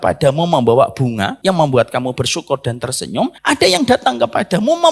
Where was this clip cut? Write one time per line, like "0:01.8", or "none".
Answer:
0:01.3
0:03.4